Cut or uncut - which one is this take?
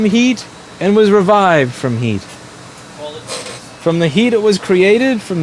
uncut